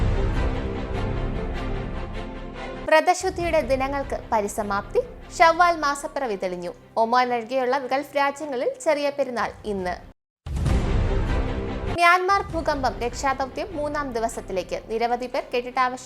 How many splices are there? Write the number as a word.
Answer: two